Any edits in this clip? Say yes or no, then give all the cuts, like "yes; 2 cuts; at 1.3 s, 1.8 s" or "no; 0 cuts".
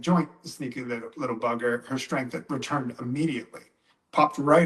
no; 0 cuts